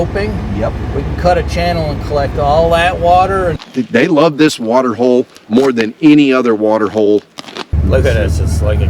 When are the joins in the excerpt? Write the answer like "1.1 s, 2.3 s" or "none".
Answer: 3.6 s, 7.6 s